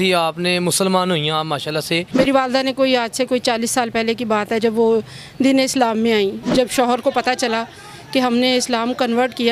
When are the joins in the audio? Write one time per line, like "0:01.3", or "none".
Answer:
0:02.1
0:06.4